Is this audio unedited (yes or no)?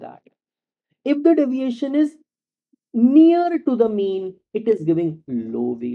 yes